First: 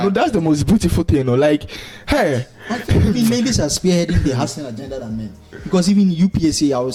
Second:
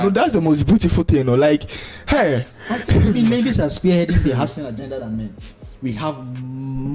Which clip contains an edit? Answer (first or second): second